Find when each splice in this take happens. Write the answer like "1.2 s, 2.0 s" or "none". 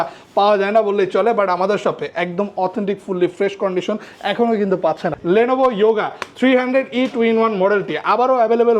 5.2 s